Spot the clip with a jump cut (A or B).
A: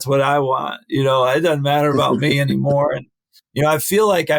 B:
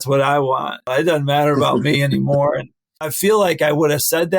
B